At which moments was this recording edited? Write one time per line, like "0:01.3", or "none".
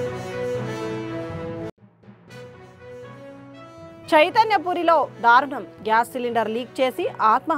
0:01.5

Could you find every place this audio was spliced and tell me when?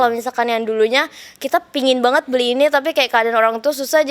none

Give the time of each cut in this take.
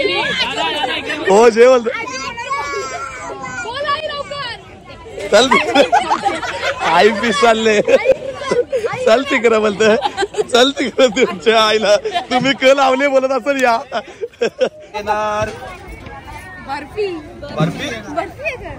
0:15.0

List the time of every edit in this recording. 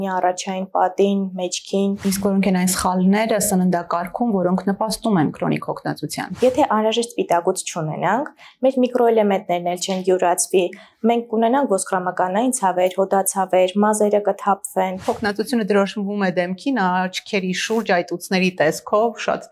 0:02.0
0:06.4
0:15.0

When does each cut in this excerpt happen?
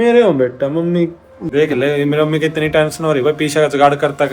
0:01.3

